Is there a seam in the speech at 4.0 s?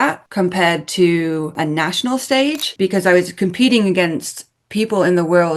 no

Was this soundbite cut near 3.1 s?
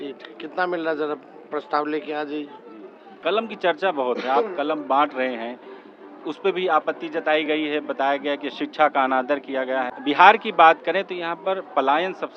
yes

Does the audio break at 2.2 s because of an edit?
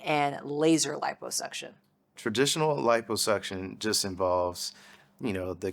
yes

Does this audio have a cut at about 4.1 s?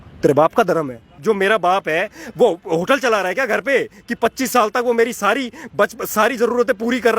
no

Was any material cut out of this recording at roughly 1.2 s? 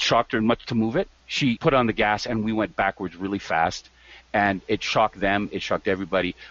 yes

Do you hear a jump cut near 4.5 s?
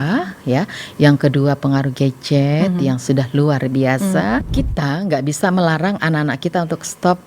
yes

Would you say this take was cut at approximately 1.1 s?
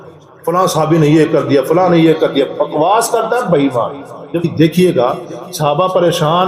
no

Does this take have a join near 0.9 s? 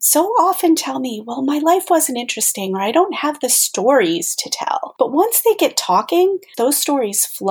no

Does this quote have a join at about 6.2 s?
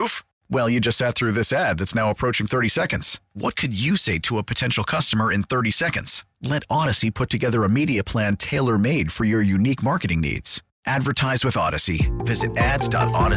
no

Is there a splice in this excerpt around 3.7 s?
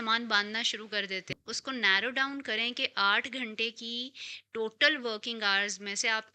no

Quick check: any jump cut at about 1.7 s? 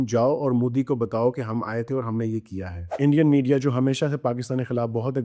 no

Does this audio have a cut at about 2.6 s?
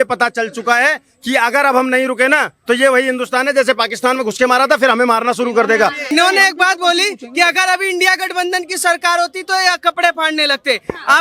no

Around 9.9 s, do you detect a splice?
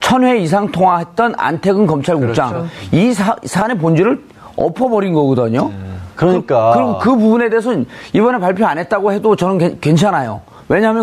yes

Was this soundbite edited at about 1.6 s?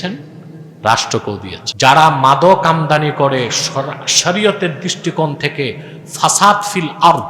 yes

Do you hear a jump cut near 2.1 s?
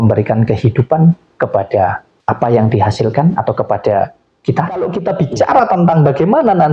no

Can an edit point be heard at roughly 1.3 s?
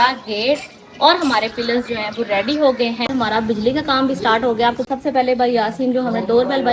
no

